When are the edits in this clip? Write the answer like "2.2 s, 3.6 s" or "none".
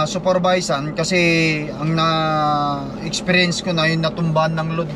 none